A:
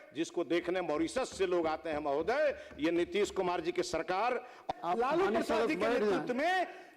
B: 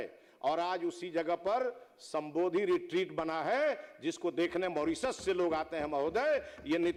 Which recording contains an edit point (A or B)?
A